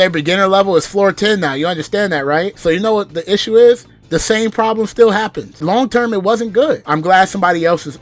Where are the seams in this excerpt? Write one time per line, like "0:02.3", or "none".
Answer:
0:02.5
0:05.5
0:06.8